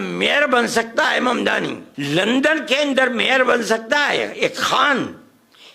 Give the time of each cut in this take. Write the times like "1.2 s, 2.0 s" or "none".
1.9 s